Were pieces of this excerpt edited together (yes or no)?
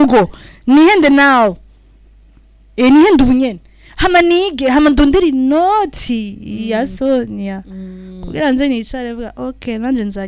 no